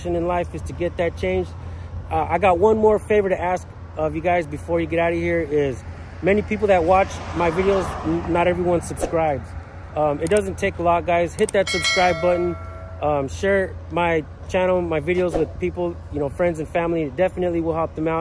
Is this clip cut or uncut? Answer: uncut